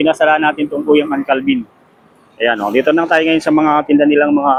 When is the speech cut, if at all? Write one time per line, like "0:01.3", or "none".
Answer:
none